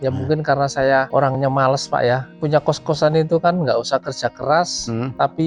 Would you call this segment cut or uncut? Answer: uncut